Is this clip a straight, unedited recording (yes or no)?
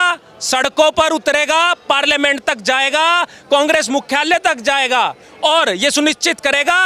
yes